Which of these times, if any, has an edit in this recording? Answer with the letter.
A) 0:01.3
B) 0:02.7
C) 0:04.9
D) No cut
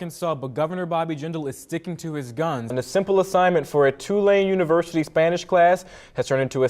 B